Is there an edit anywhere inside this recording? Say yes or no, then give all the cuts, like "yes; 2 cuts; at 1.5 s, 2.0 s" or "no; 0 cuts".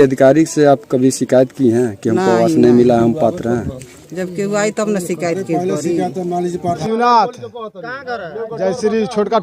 yes; 1 cut; at 6.8 s